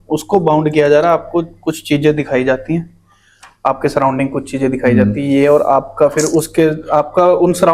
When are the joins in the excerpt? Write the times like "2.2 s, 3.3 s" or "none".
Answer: none